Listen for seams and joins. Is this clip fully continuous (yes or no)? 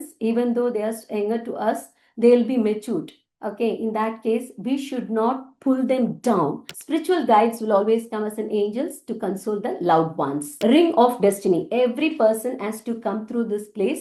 no